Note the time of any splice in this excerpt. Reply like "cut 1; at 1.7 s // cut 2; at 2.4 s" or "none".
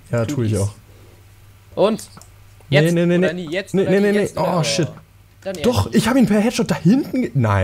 none